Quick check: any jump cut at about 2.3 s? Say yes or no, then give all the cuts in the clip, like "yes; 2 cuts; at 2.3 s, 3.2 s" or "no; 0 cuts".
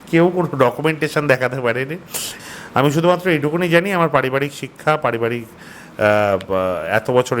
yes; 1 cut; at 2.3 s